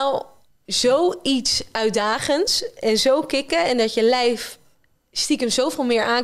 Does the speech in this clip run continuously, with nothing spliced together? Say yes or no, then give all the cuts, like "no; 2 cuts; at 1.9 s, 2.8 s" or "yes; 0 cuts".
yes; 0 cuts